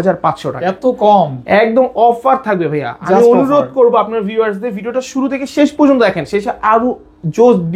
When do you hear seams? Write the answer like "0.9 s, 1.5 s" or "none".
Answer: none